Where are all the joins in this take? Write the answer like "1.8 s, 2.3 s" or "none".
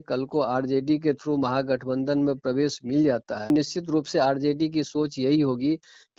3.5 s